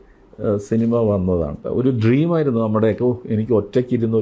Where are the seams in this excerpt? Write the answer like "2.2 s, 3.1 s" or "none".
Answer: 1.6 s

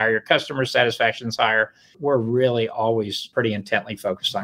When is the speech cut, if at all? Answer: 1.9 s, 3.2 s

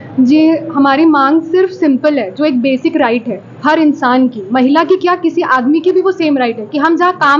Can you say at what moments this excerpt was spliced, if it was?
none

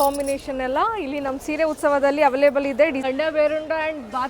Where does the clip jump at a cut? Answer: 3.0 s

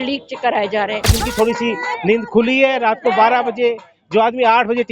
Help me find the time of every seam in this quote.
1.2 s

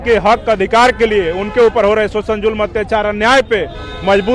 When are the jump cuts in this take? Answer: none

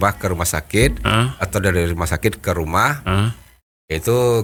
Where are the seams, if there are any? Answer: none

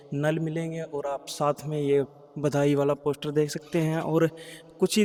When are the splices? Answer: none

